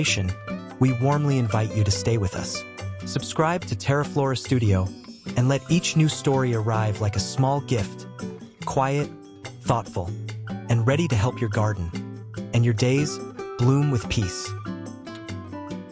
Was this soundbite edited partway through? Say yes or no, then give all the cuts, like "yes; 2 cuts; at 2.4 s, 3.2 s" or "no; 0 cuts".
yes; 1 cut; at 14.3 s